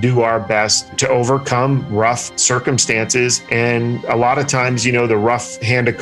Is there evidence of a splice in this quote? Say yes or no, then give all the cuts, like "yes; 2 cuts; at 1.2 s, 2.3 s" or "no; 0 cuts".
yes; 2 cuts; at 0.9 s, 3.9 s